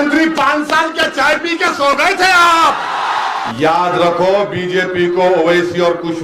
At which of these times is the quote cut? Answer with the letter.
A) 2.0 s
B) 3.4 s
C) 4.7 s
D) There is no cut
B